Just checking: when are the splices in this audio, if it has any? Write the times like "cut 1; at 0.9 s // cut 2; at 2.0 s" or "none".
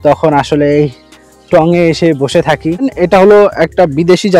cut 1; at 2.9 s